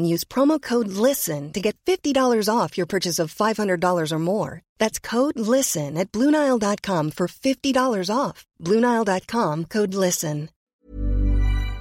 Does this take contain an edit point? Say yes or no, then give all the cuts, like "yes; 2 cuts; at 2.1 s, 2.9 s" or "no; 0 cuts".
yes; 1 cut; at 10.5 s